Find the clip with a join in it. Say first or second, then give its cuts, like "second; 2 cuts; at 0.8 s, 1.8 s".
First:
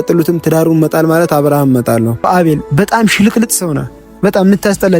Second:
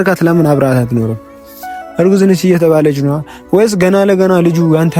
first; 1 cut; at 2.3 s